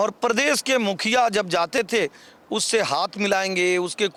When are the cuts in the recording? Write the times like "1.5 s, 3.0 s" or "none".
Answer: none